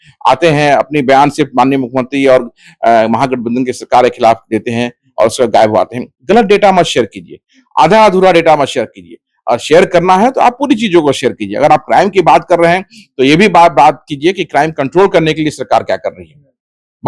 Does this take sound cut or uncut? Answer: uncut